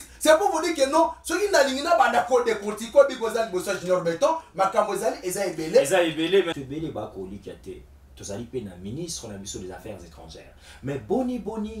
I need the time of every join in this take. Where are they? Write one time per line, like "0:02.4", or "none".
0:06.5